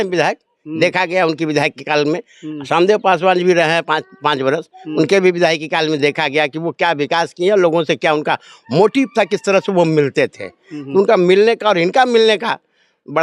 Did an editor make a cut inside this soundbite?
no; 0 cuts

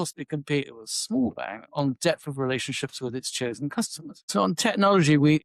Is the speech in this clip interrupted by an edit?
yes; 1 cut; at 4.1 s

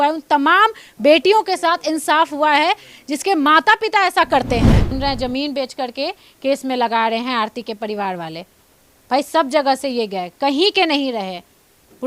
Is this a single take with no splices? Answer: no; 1 cut; at 4.9 s

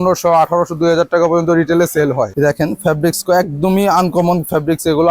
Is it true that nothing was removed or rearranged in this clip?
no; 1 cut; at 2.3 s

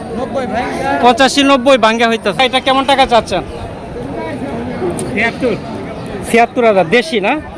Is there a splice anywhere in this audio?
yes; 1 cut; at 2.5 s

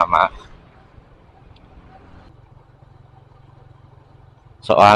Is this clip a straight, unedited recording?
no; 1 cut; at 2.3 s

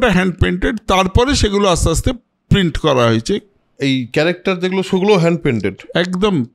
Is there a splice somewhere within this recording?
no; 0 cuts

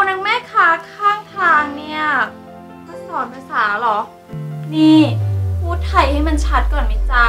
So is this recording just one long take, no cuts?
yes; 0 cuts

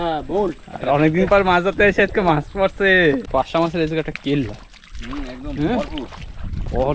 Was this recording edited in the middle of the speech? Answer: yes; 1 cut; at 3.3 s

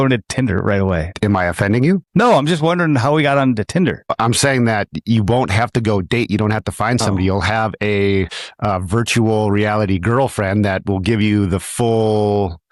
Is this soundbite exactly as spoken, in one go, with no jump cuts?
yes; 0 cuts

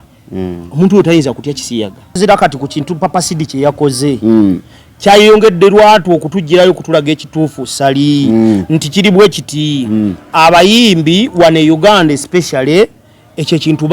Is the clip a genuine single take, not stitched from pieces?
no; 1 cut; at 2.2 s

